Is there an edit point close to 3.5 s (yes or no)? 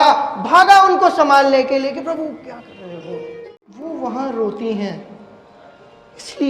yes